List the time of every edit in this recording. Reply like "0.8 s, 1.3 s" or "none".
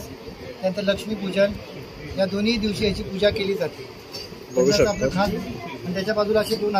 none

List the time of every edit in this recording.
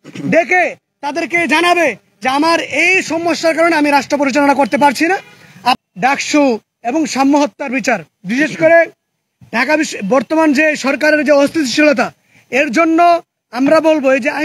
5.8 s

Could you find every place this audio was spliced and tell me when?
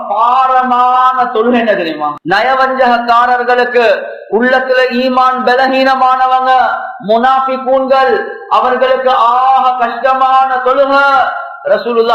2.2 s

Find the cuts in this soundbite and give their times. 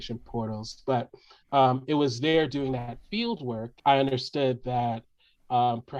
3.7 s

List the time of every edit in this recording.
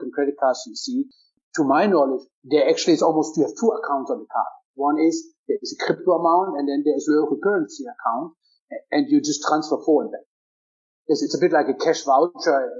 1.2 s, 2.3 s

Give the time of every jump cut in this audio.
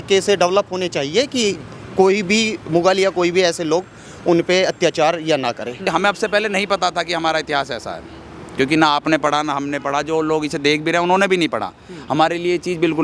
5.9 s

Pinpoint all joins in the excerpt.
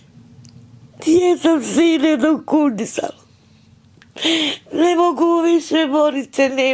none

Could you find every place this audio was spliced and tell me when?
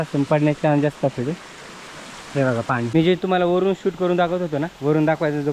2.9 s

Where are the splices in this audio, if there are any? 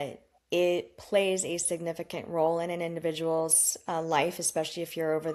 none

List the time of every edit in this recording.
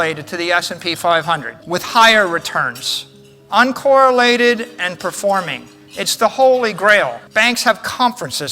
1.5 s, 7.2 s

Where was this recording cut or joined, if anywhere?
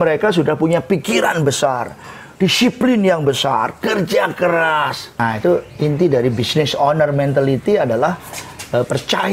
5.1 s

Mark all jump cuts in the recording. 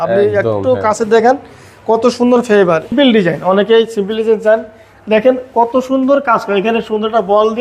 2.9 s

